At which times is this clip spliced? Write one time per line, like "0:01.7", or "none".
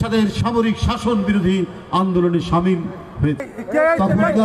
0:03.5